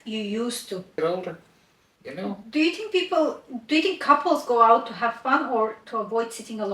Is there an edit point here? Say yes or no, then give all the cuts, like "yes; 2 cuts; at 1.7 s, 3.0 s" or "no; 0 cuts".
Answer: yes; 1 cut; at 1.0 s